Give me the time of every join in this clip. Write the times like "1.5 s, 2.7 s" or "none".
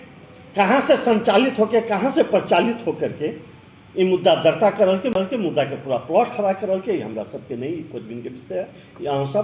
none